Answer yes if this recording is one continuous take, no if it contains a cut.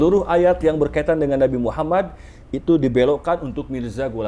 yes